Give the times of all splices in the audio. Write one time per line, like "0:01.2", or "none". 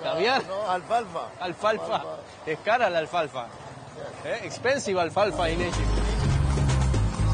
0:06.2